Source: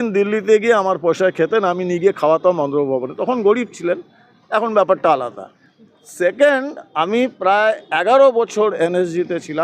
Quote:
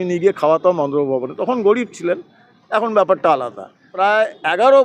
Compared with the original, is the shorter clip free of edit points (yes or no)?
no